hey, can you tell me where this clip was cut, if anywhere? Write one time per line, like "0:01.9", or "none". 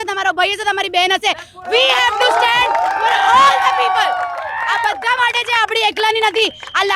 none